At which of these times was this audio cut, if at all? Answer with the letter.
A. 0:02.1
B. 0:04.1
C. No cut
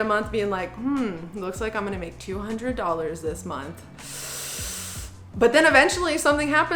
C